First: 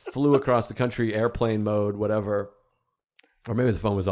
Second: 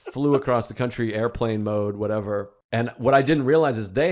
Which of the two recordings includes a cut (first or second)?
second